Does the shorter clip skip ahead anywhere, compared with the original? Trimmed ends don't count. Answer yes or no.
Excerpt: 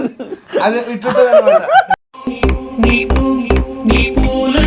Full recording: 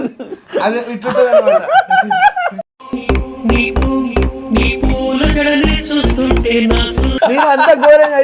yes